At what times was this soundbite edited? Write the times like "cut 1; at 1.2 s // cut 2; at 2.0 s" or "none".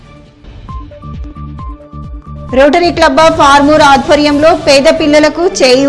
cut 1; at 1.1 s